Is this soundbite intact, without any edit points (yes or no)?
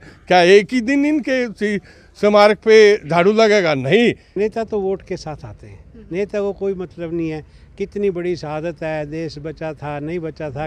no